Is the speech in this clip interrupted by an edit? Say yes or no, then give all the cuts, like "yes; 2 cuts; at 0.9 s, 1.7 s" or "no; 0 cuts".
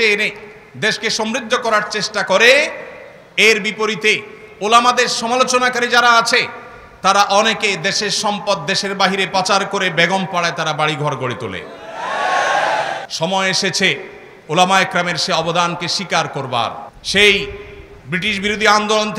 yes; 2 cuts; at 13.0 s, 16.9 s